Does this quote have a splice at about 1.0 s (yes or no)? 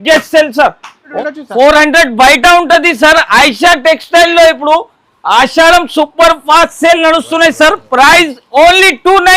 yes